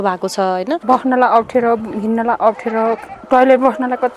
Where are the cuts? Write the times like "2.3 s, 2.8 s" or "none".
0.8 s, 3.1 s